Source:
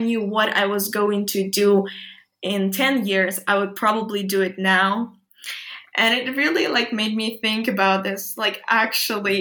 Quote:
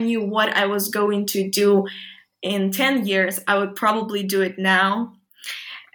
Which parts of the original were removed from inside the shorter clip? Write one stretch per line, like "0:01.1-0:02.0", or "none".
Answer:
none